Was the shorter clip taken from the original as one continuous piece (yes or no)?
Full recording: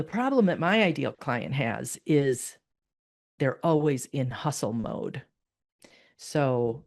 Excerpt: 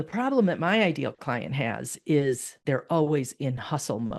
no